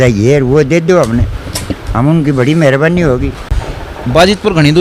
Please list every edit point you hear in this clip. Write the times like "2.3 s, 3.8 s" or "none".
3.5 s